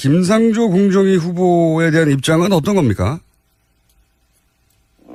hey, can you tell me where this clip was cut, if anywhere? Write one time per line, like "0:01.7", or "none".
none